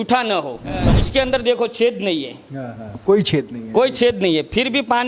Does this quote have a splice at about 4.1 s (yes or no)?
no